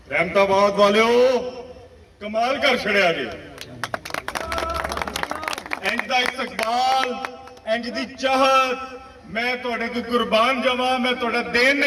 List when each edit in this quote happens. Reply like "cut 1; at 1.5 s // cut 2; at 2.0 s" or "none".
none